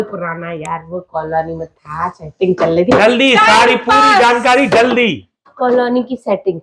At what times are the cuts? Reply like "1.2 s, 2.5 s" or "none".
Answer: none